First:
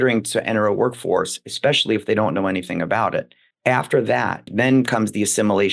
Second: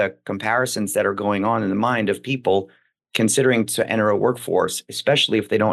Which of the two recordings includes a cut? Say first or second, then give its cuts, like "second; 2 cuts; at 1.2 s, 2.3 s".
first; 2 cuts; at 3.4 s, 4.4 s